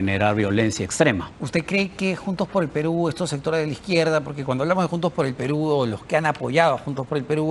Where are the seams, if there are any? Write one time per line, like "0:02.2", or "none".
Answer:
none